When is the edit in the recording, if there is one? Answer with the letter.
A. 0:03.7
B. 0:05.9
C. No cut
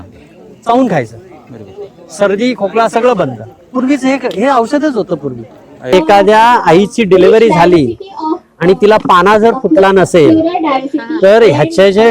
B